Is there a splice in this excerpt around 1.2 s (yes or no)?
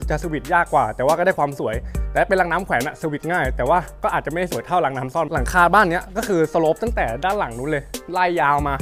no